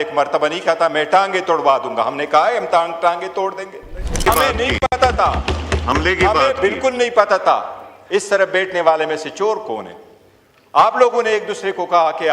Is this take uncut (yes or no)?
no